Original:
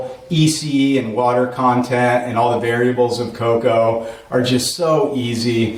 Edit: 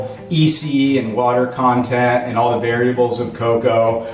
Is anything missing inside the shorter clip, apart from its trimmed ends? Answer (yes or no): no